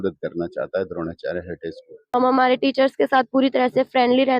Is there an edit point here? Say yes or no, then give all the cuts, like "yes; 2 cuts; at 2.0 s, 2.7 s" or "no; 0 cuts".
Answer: yes; 1 cut; at 1.9 s